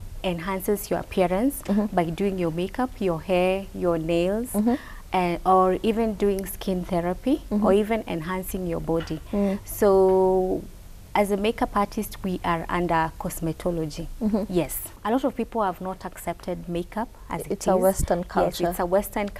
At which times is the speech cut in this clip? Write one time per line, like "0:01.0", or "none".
0:14.9